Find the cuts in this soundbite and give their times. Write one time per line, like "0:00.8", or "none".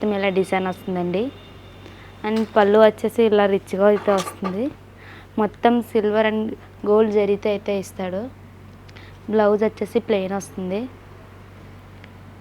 none